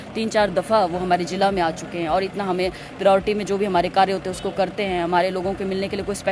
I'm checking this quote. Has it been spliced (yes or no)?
no